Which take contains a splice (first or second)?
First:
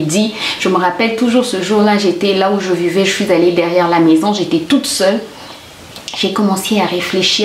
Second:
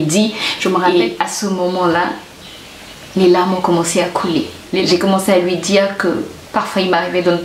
second